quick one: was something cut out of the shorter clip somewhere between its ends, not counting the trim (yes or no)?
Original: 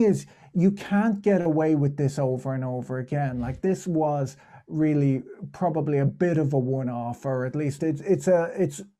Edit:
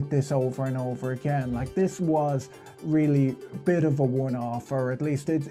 yes